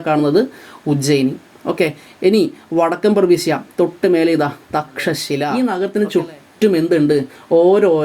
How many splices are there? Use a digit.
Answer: 1